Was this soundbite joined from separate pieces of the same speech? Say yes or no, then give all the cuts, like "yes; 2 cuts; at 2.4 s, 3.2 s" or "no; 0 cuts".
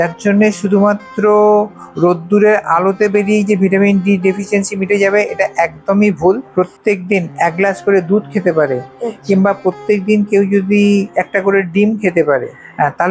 yes; 1 cut; at 6.5 s